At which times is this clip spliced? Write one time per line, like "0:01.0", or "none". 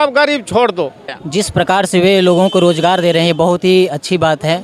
0:01.1